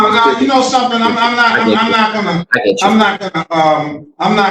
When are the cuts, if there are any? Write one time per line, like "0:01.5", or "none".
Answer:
none